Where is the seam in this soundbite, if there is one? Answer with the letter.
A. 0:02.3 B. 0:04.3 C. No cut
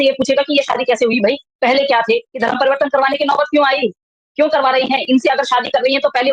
A